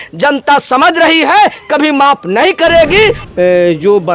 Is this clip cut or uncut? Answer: cut